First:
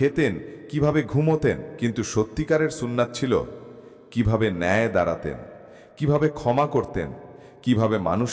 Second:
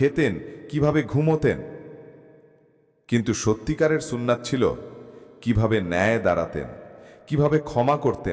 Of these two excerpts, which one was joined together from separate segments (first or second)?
first